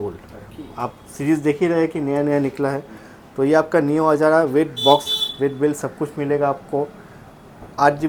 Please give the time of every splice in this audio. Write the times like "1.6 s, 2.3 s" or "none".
none